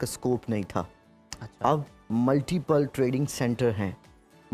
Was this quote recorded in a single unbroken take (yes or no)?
yes